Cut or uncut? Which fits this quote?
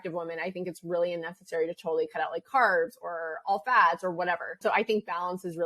cut